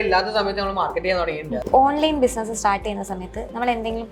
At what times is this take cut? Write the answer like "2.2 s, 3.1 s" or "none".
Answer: 1.6 s